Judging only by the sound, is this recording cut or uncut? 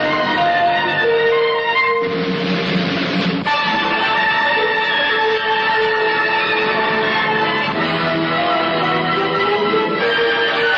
cut